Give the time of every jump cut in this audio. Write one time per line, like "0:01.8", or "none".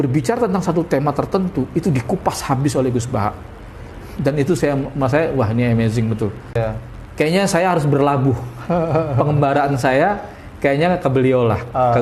0:06.6